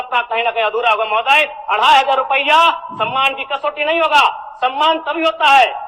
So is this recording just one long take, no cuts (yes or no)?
yes